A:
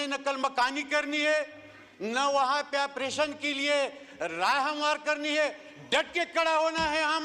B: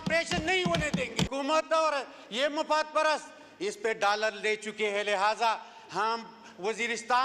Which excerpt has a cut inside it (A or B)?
B